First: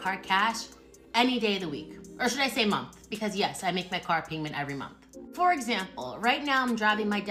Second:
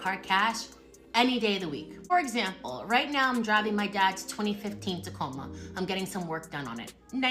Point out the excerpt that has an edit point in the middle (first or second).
second